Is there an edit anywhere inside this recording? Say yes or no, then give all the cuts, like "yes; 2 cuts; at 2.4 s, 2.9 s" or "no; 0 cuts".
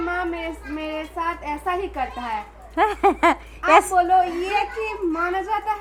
no; 0 cuts